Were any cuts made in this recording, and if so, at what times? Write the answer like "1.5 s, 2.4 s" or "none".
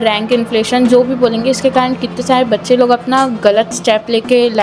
none